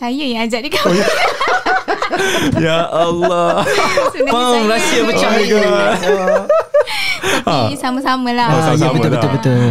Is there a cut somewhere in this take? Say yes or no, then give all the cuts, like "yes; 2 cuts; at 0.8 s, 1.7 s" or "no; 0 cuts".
no; 0 cuts